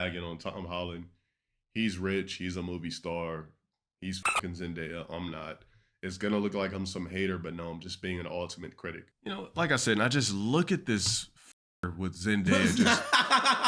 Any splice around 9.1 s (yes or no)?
yes